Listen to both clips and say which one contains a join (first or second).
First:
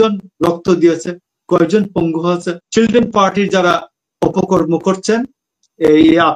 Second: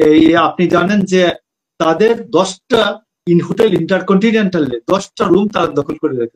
first